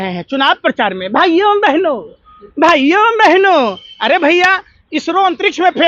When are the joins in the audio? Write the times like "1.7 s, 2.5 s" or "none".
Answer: none